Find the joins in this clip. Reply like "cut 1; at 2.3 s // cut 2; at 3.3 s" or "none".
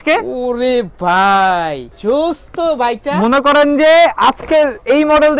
cut 1; at 1.9 s